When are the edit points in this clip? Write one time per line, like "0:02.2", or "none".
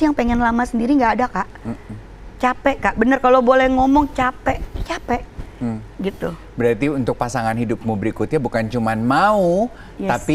none